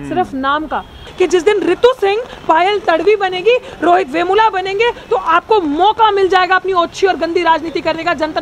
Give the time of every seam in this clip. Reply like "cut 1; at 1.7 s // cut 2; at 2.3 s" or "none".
cut 1; at 1.0 s